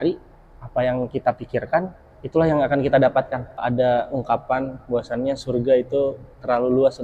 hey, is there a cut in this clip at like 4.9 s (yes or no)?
no